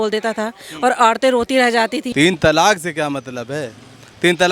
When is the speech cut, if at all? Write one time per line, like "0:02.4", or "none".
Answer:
0:02.0